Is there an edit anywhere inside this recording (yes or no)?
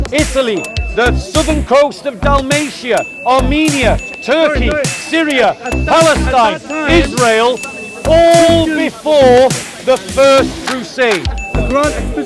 yes